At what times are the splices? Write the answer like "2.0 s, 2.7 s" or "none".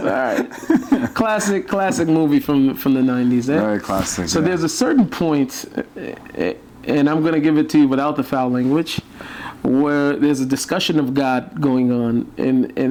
none